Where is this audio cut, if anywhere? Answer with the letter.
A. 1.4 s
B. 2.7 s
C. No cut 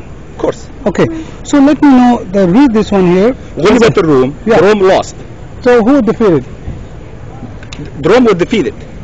C